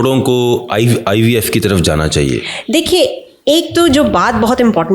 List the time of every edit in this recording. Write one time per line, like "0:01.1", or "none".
none

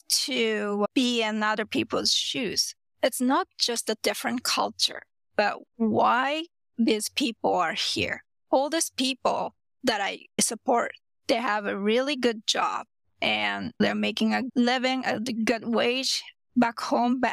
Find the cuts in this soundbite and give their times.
0:02.8

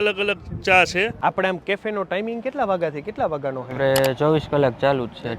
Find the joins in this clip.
0:01.1

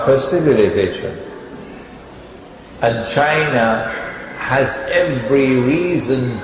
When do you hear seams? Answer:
0:02.4

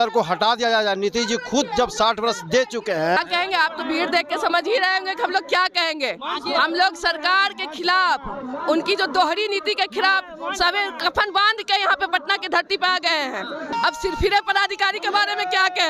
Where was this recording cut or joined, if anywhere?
0:03.2
0:13.7

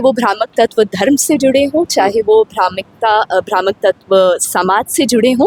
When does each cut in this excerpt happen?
none

